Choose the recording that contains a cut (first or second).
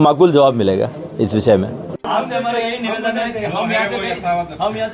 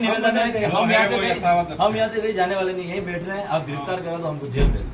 first